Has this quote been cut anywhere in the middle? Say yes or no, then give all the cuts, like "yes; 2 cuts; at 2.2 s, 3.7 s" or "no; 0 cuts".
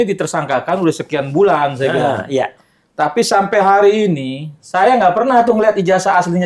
no; 0 cuts